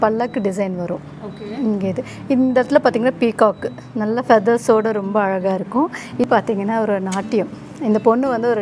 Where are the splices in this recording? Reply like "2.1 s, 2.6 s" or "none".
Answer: 6.3 s